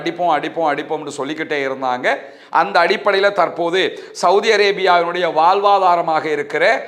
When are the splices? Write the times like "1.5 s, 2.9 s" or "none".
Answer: none